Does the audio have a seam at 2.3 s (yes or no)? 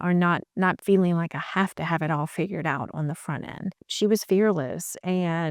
no